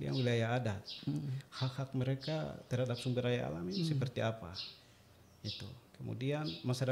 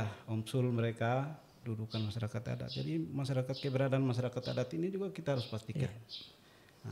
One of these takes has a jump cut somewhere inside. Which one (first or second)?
second